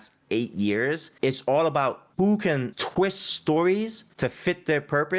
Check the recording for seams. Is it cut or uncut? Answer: cut